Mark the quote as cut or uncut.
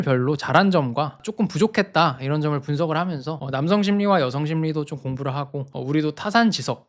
uncut